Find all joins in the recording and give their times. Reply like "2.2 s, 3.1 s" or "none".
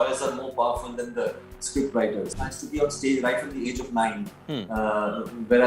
2.3 s